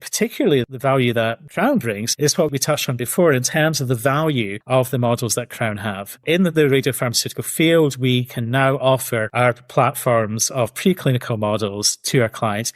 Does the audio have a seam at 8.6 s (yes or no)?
no